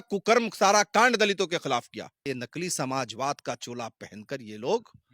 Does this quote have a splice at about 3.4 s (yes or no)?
no